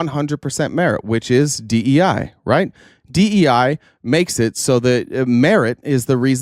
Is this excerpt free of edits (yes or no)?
yes